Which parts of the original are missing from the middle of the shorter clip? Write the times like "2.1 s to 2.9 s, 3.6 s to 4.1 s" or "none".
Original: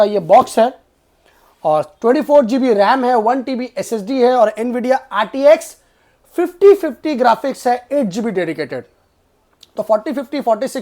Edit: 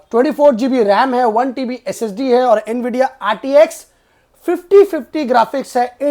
none